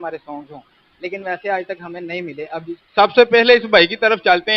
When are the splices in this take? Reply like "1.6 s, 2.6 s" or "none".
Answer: 2.8 s